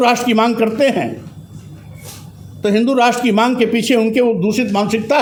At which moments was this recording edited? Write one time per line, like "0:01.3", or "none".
none